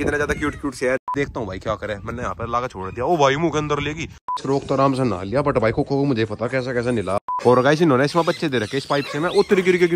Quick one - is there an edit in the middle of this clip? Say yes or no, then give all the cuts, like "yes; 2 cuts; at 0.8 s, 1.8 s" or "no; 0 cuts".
yes; 3 cuts; at 1.0 s, 4.3 s, 7.3 s